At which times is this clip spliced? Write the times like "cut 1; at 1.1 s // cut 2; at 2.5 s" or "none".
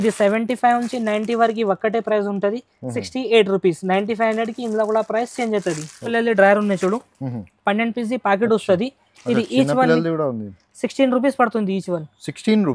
cut 1; at 6.1 s

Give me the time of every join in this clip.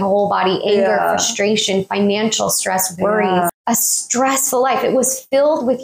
cut 1; at 3.5 s

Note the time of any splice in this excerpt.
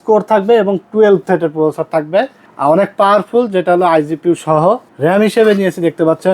cut 1; at 2.4 s // cut 2; at 4.9 s

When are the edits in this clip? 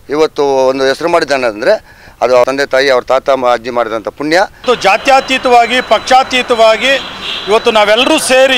cut 1; at 2.5 s // cut 2; at 4.6 s

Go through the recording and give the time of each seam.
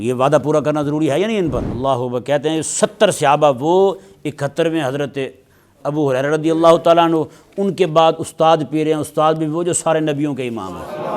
cut 1; at 1.7 s

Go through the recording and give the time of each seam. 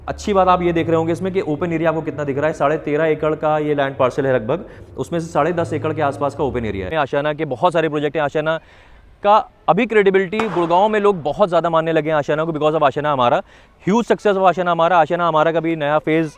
cut 1; at 6.9 s

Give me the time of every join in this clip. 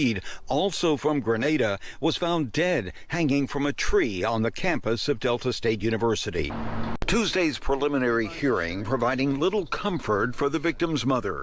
cut 1; at 6.6 s

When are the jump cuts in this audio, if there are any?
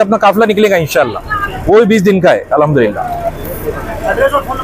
none

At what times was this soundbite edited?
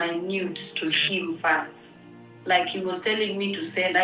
none

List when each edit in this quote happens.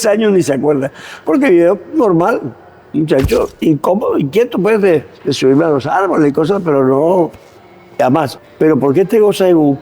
cut 1; at 8.4 s

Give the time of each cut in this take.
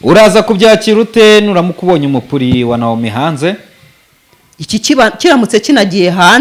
none

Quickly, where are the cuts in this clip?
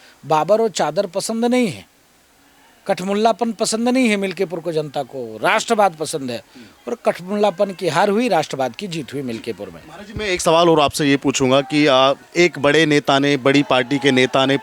none

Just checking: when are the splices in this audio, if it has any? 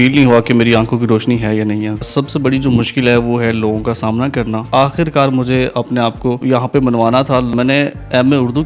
cut 1; at 2.1 s // cut 2; at 4.7 s // cut 3; at 6.4 s // cut 4; at 7.5 s

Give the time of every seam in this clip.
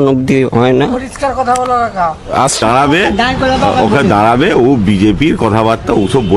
cut 1; at 2.6 s

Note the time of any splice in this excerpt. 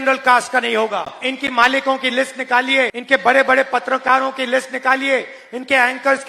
cut 1; at 1.1 s // cut 2; at 3.0 s

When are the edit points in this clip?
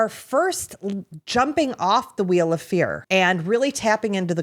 cut 1; at 3.0 s

